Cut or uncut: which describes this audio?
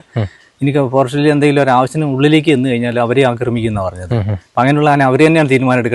uncut